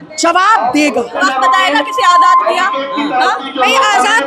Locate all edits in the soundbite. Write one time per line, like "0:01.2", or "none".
0:01.2